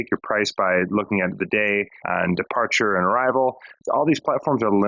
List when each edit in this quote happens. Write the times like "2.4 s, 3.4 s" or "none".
2.0 s, 3.7 s